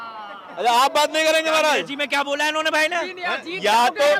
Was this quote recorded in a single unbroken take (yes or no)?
yes